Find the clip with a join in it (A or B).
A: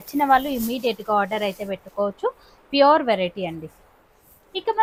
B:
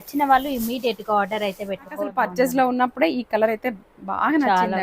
B